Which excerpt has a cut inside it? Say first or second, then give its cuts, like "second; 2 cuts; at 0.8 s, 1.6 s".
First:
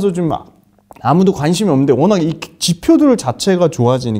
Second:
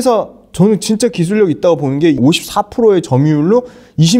second; 1 cut; at 2.2 s